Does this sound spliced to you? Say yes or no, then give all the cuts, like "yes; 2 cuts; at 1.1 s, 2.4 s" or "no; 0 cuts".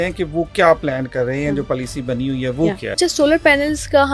yes; 1 cut; at 2.9 s